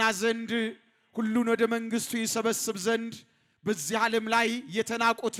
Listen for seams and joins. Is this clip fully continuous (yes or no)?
yes